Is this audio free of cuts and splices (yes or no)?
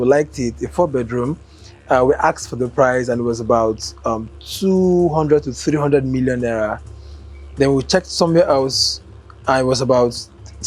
yes